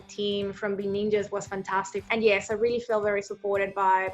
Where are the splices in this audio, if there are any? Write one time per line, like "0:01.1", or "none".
0:02.0